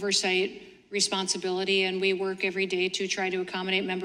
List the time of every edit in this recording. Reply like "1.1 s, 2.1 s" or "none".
none